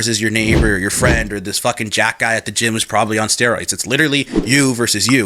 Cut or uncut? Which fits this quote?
cut